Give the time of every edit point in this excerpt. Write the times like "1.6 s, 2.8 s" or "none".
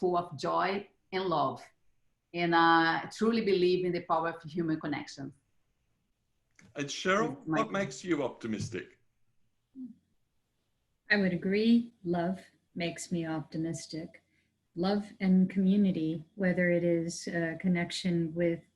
none